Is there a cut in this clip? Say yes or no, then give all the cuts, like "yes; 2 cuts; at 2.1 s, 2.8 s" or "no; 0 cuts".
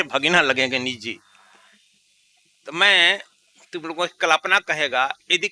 no; 0 cuts